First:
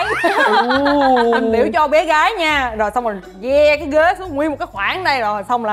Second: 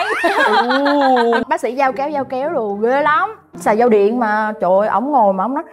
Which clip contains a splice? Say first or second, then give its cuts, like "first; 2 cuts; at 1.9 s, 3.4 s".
second; 2 cuts; at 1.4 s, 3.6 s